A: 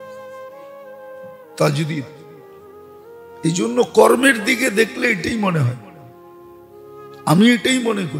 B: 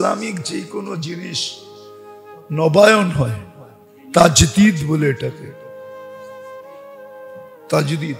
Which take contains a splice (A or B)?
A